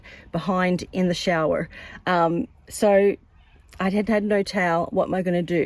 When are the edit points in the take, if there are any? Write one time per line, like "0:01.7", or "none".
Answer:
none